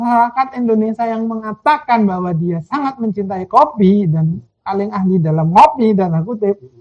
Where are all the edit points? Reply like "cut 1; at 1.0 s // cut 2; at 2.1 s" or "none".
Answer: none